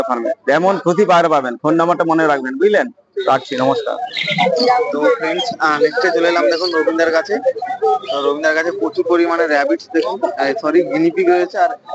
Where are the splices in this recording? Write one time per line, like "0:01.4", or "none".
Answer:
none